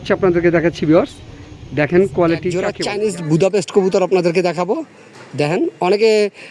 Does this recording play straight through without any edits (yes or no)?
no